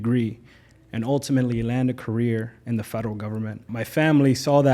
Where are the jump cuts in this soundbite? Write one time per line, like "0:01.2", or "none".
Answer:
0:03.7